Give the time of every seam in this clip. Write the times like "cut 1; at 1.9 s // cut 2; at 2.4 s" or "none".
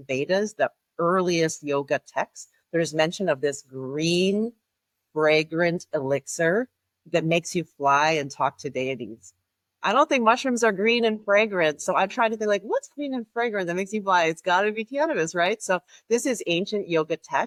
none